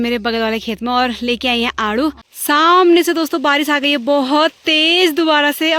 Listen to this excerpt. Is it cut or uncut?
cut